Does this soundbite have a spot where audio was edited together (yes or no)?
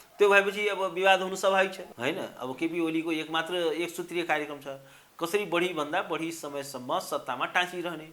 yes